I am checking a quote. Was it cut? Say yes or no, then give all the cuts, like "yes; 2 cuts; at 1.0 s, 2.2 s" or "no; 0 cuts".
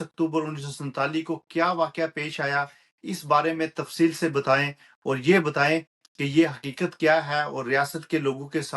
no; 0 cuts